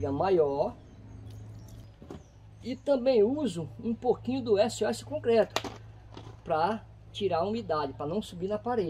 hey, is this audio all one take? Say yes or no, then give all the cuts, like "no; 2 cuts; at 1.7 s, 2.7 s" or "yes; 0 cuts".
no; 1 cut; at 1.9 s